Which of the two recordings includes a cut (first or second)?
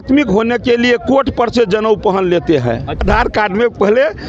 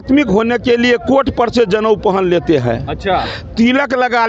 first